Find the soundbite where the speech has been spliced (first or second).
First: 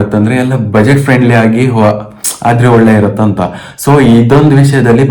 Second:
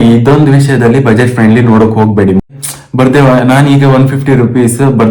second